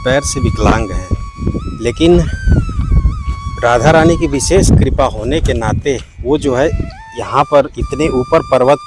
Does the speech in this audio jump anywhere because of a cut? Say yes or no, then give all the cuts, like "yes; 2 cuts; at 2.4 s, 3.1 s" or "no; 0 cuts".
no; 0 cuts